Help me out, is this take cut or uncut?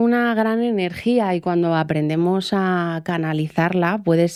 uncut